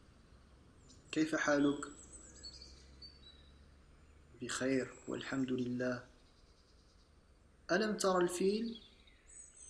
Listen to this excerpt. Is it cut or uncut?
uncut